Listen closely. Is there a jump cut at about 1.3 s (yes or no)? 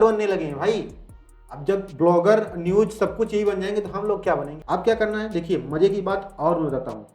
no